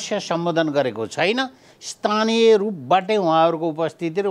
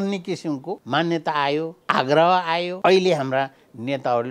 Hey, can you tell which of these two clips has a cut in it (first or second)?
second